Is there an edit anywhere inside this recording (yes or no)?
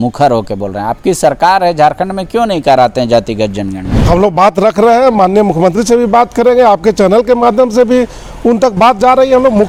no